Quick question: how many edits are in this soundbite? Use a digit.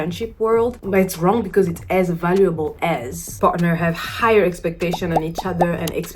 1